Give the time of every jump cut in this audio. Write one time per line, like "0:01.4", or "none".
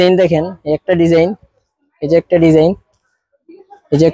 none